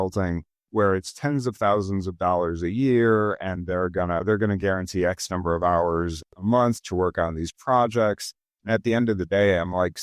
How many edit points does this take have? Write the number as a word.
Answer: one